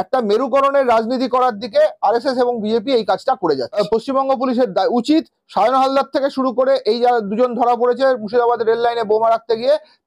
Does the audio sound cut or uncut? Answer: cut